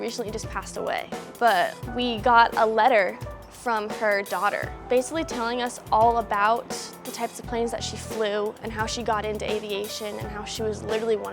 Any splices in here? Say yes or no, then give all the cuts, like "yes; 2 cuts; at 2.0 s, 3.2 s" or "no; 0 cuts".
no; 0 cuts